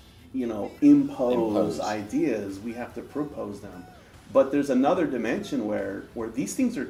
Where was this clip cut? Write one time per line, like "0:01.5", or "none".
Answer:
none

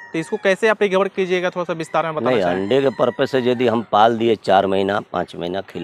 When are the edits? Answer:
none

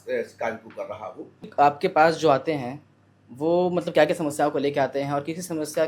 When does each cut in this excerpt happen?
0:01.5

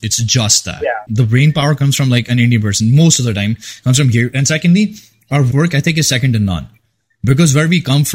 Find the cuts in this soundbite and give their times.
0:01.1
0:05.5

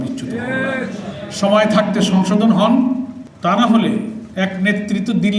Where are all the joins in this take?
0:03.2
0:04.2

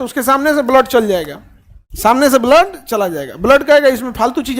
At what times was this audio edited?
none

